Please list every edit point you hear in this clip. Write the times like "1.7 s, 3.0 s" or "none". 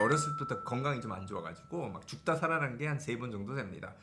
none

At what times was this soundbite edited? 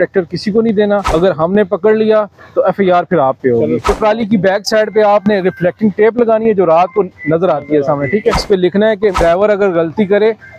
1.1 s, 3.9 s, 8.8 s

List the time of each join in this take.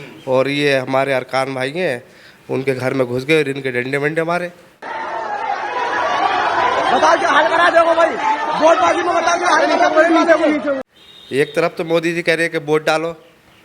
4.7 s, 10.9 s

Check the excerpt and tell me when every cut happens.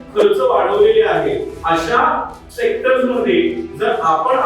1.5 s, 2.4 s

